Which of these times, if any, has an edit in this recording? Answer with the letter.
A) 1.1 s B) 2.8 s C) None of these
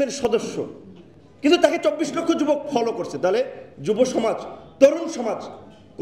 C